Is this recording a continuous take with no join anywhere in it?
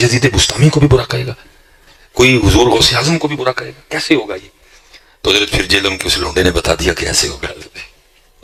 yes; 0 cuts

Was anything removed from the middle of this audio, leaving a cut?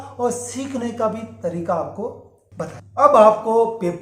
no; 0 cuts

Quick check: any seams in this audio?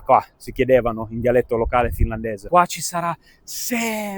yes; 1 cut; at 2.5 s

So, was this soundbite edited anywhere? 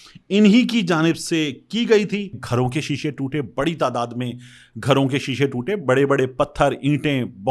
yes; 1 cut; at 2.4 s

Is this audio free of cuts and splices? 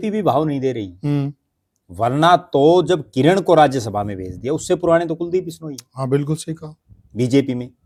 yes; 0 cuts

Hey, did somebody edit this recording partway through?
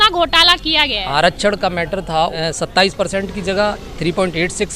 yes; 1 cut; at 2.4 s

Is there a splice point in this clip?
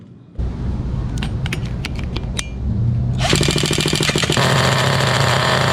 no; 0 cuts

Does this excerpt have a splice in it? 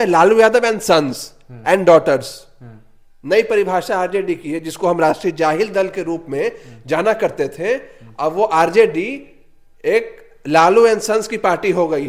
no; 0 cuts

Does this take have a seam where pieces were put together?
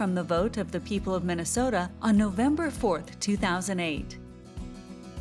yes; 1 cut; at 4.1 s

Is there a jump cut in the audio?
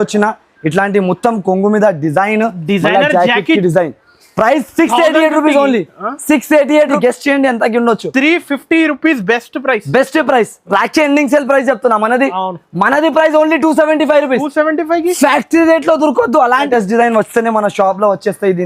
yes; 2 cuts; at 7.0 s, 16.7 s

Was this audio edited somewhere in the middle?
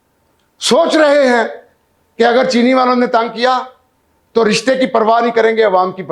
no; 0 cuts

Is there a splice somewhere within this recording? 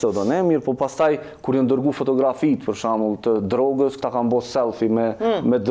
no; 0 cuts

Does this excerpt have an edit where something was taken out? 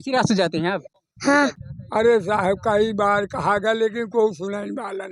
yes; 2 cuts; at 1.0 s, 1.6 s

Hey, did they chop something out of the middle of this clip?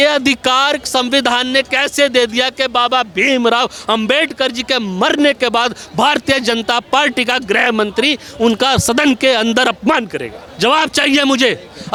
no; 0 cuts

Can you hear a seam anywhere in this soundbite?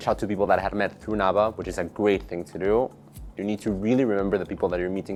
no; 0 cuts

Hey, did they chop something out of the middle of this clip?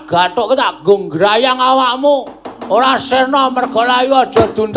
no; 0 cuts

